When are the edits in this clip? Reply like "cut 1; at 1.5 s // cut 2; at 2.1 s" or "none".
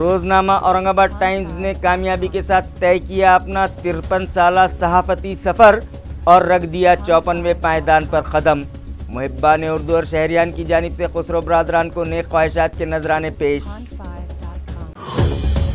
cut 1; at 13.6 s // cut 2; at 14.9 s